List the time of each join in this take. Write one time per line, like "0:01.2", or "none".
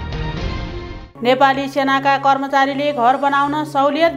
none

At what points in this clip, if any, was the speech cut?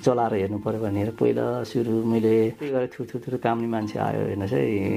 0:02.7

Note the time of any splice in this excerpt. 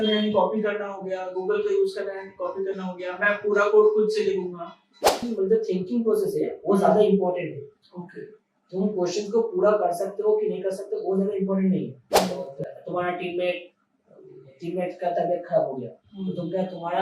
0:05.2
0:12.2

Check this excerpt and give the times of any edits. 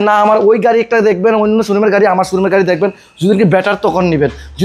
none

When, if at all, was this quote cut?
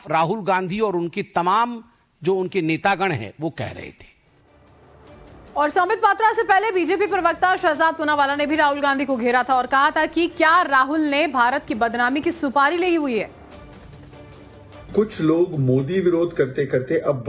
none

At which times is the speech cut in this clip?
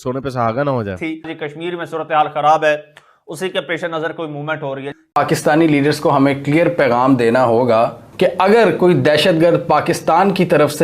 0:01.0
0:05.2

